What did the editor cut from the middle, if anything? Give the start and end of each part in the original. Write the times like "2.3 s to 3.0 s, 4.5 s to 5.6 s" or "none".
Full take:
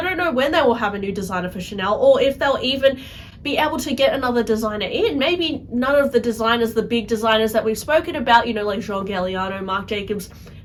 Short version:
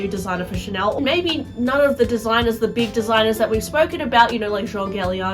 2.0 s to 5.1 s